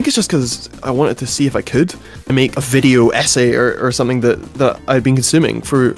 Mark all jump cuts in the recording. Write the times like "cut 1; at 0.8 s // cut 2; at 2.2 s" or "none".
cut 1; at 2.2 s // cut 2; at 4.5 s